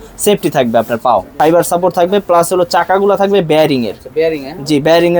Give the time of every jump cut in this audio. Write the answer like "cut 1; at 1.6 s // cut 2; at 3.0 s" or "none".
cut 1; at 1.3 s